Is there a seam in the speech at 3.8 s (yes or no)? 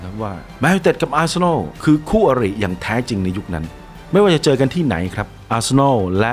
yes